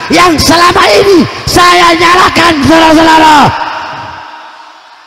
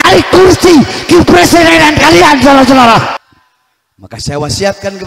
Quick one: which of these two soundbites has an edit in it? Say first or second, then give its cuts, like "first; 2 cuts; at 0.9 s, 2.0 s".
second; 1 cut; at 3.2 s